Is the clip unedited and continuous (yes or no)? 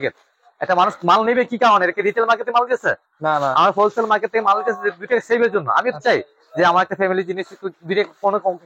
yes